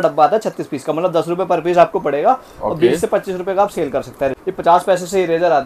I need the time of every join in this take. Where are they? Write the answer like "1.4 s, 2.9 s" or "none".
4.4 s